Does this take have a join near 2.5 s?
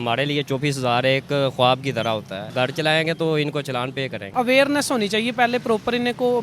yes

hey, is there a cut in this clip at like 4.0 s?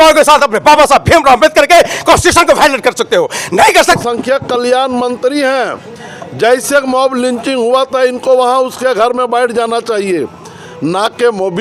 yes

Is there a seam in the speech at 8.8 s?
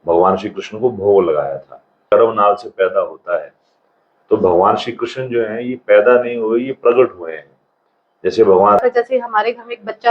yes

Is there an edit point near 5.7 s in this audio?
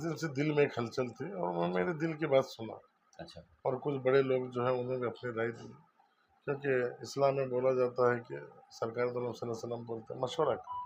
no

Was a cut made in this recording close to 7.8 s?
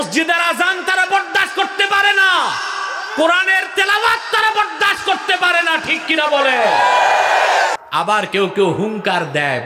yes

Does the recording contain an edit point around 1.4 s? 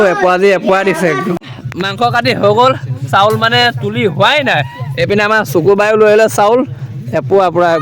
yes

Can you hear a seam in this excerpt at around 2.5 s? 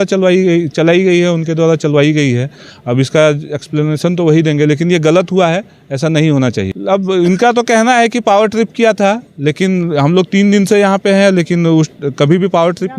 no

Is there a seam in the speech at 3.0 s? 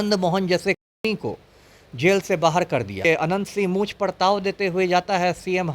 yes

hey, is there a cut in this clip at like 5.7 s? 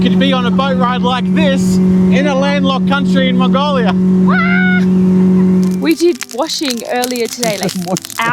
yes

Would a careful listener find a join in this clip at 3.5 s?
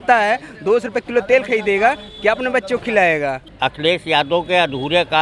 yes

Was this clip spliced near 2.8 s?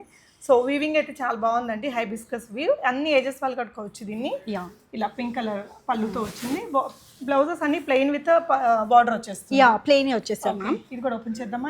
no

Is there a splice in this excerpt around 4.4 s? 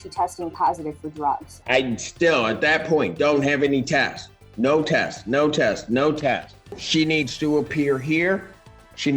no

